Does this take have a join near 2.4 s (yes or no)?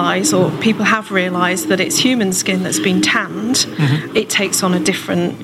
no